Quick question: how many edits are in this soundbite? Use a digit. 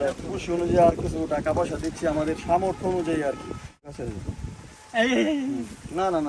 1